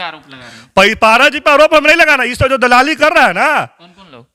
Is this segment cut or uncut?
uncut